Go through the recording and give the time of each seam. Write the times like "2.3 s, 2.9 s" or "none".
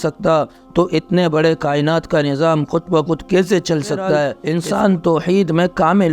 4.4 s